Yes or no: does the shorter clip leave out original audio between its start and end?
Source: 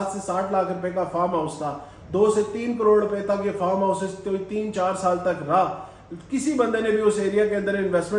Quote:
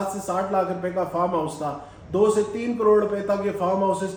no